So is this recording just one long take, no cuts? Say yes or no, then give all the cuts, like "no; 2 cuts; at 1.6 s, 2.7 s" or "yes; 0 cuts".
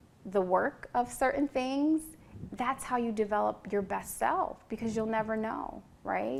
yes; 0 cuts